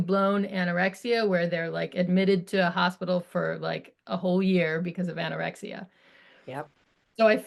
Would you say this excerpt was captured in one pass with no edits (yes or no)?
yes